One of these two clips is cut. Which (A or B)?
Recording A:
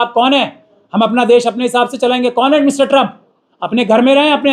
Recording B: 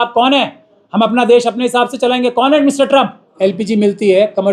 B